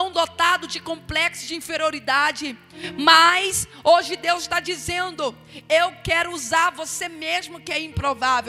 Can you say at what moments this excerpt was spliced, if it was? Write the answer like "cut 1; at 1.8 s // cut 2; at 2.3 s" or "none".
none